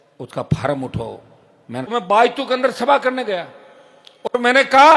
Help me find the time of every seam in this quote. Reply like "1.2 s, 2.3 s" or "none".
1.9 s